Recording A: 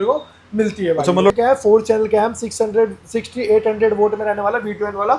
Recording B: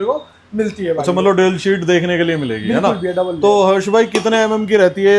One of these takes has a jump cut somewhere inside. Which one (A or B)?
A